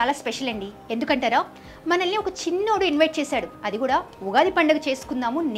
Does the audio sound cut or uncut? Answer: uncut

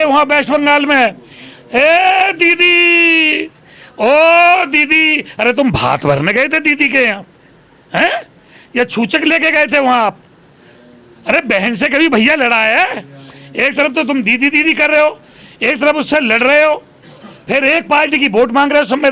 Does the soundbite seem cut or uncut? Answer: uncut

